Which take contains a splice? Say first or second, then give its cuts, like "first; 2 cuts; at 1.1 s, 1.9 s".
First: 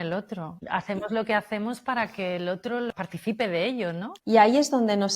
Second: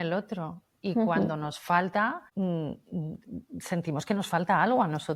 first; 3 cuts; at 0.9 s, 2.9 s, 4.1 s